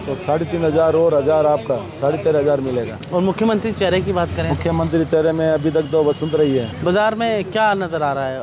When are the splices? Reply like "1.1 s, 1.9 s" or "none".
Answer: 3.0 s, 6.7 s